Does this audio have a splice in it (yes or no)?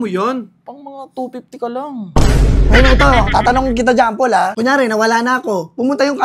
yes